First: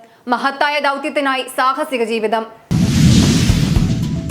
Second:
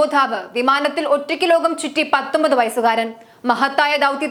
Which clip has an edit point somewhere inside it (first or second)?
first